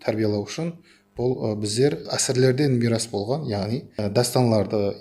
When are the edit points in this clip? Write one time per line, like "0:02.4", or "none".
0:02.1
0:03.9